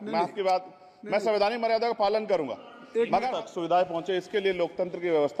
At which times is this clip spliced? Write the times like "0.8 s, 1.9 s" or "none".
3.4 s